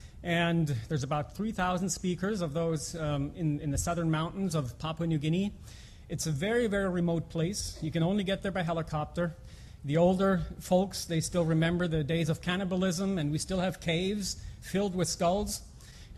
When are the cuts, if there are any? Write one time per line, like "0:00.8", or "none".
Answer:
0:08.7